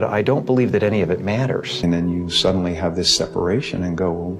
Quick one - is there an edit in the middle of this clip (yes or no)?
yes